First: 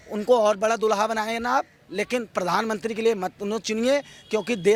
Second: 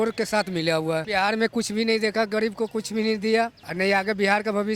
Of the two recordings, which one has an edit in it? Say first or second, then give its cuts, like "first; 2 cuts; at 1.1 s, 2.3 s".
second; 2 cuts; at 1.1 s, 3.6 s